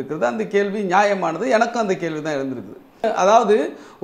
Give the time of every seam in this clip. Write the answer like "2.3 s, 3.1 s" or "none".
3.0 s